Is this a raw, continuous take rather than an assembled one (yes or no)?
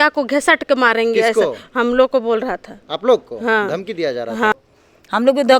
no